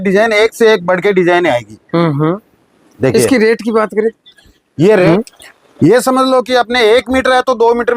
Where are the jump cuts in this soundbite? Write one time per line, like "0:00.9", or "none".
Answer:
0:05.1